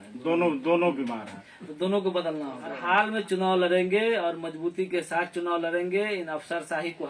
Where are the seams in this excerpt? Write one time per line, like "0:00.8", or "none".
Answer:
0:02.7